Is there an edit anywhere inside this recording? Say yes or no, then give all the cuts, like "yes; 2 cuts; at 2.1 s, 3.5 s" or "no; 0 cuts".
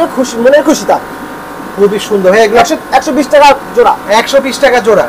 no; 0 cuts